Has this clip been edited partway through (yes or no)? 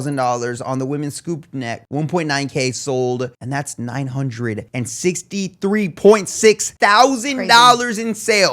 yes